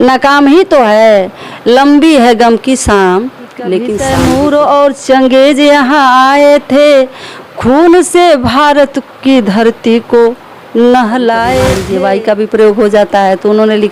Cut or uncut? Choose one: cut